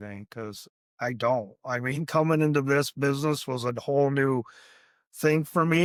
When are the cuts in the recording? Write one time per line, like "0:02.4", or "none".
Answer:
none